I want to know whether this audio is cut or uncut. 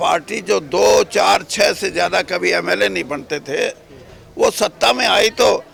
uncut